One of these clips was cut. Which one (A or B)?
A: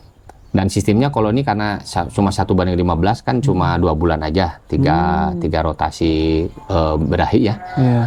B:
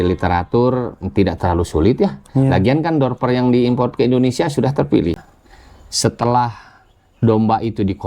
B